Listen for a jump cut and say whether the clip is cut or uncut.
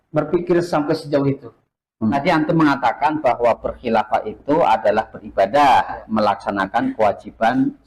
cut